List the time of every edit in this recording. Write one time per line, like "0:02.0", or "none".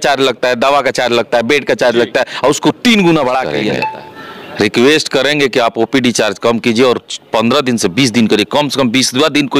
0:03.6